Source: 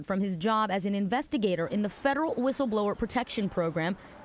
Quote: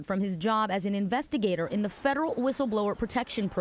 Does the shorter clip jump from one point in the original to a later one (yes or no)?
no